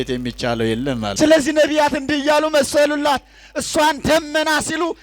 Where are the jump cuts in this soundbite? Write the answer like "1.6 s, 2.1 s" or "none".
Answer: 1.1 s